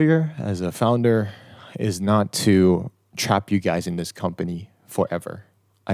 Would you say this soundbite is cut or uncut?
uncut